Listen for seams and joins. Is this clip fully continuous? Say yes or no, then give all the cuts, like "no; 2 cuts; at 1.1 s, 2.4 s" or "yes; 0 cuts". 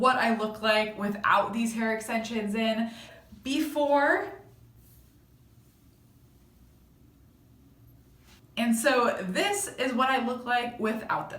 no; 3 cuts; at 3.1 s, 5.3 s, 8.4 s